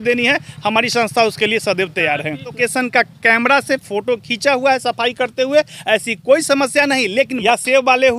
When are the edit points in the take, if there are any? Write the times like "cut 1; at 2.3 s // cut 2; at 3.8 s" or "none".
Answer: cut 1; at 2.6 s // cut 2; at 7.4 s